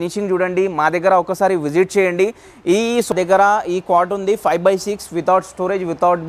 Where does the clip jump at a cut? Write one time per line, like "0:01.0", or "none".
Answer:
0:03.1